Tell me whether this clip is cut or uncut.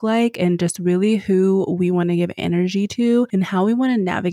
cut